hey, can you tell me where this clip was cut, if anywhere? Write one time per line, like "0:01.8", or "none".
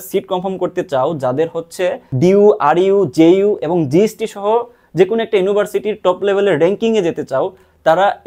0:02.1